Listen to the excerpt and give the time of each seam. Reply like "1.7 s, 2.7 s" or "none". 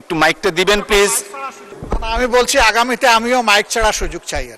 1.9 s